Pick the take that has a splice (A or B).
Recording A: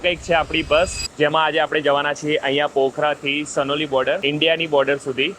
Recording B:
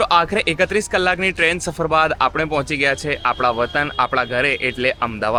A